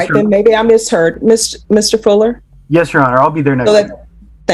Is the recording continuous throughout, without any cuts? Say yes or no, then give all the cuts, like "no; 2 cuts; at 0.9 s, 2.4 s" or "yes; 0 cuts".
yes; 0 cuts